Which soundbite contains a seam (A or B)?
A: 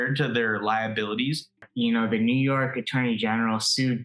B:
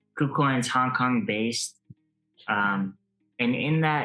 A